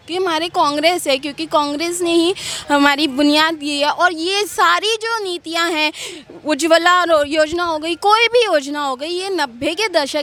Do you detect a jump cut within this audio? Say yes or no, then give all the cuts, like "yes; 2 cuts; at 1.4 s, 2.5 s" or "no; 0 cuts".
no; 0 cuts